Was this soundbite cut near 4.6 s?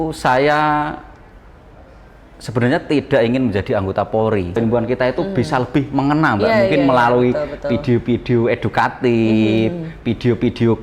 yes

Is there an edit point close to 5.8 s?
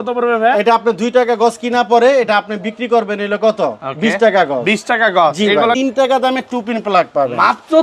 yes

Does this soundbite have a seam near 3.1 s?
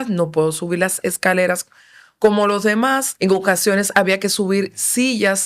yes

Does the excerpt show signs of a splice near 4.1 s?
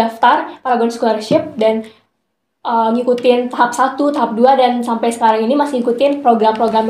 no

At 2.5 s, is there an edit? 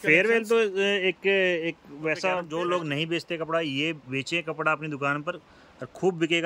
yes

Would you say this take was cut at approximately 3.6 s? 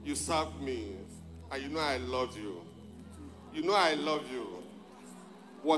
no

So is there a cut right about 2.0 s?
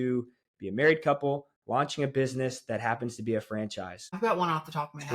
no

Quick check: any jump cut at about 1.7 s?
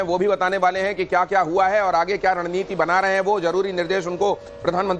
yes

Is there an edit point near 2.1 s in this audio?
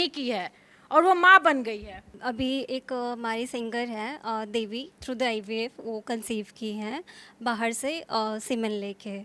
yes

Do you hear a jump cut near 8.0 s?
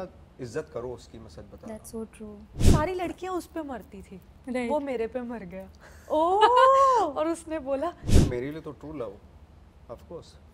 yes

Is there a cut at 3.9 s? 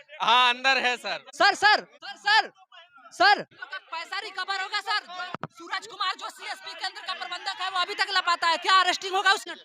no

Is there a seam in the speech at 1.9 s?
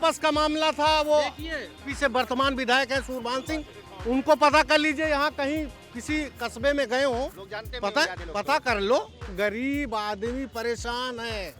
yes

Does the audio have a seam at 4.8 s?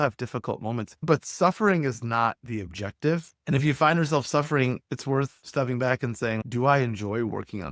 no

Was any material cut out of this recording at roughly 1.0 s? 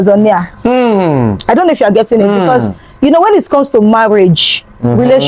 no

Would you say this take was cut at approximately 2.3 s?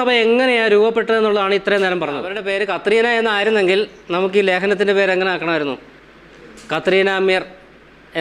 yes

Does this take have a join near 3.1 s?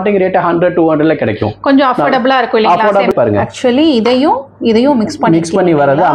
yes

